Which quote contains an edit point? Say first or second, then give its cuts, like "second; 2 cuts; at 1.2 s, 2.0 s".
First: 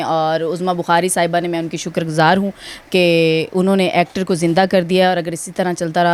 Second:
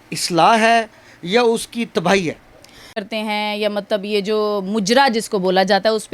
second; 1 cut; at 3.0 s